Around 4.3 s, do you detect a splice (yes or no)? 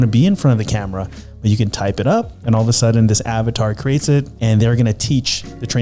yes